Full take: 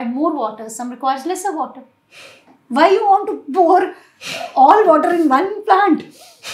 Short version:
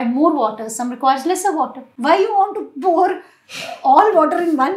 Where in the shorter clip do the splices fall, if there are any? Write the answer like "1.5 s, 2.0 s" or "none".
1.8 s